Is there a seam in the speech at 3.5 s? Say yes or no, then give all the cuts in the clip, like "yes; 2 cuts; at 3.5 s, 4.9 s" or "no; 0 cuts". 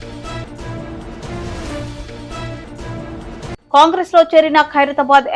yes; 1 cut; at 3.5 s